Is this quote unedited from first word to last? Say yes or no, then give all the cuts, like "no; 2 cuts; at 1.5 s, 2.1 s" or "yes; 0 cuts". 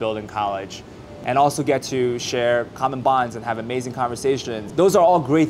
no; 2 cuts; at 1.1 s, 4.6 s